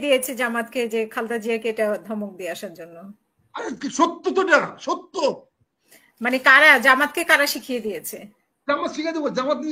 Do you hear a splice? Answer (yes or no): no